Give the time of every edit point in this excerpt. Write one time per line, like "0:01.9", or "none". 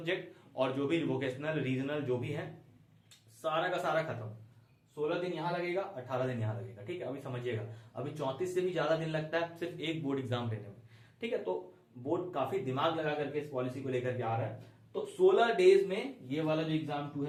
none